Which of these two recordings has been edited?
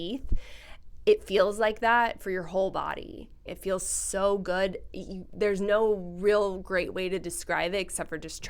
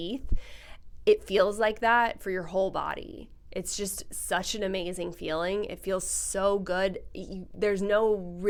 first; 1 cut; at 3.5 s

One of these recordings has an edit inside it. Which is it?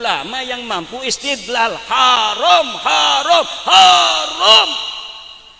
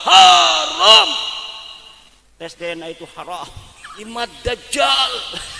second; 1 cut; at 4.1 s

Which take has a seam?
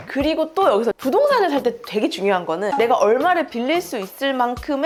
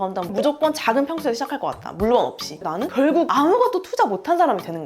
second; 1 cut; at 2.6 s

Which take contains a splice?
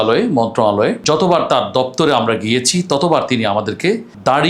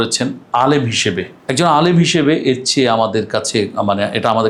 first; 1 cut; at 1.0 s

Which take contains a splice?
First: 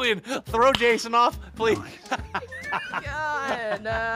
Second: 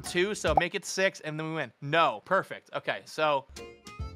second; 1 cut; at 2.2 s

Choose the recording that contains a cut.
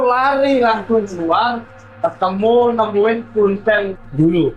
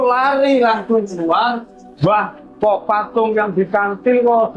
second; 1 cut; at 1.9 s

